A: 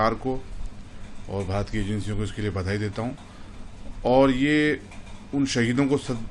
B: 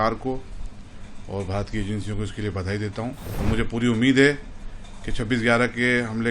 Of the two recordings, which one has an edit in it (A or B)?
B